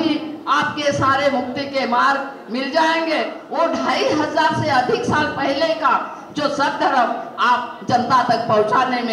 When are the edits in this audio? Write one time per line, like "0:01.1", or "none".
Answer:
0:03.4